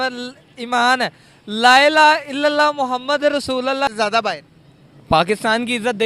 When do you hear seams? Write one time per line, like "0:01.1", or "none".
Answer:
0:03.9